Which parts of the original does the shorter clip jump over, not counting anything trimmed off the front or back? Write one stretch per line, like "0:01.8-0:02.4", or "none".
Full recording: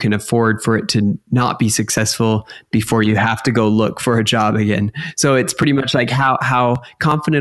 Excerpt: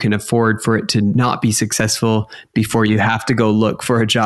0:01.1-0:01.3